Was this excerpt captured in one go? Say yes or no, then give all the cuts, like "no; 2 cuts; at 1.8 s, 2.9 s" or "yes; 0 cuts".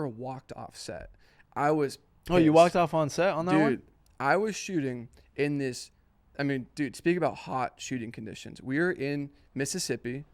yes; 0 cuts